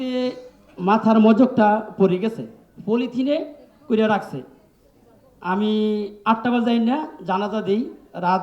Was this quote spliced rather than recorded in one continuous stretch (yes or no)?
no